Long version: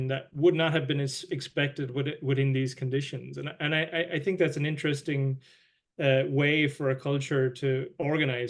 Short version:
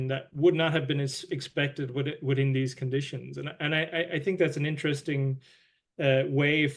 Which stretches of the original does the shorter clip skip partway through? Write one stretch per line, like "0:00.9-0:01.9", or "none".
none